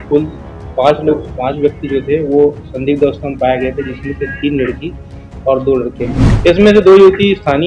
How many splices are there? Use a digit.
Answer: 1